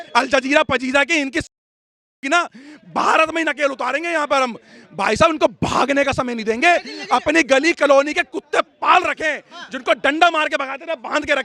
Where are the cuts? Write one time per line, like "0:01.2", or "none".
none